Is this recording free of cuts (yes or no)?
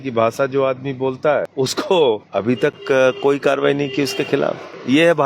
no